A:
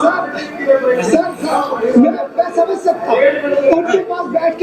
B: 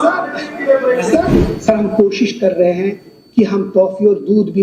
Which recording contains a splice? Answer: B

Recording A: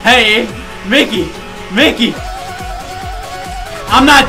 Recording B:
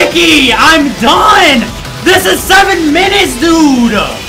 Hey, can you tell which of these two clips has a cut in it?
A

